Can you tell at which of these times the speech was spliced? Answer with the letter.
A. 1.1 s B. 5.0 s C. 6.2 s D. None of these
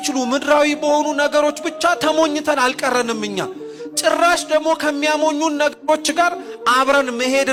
D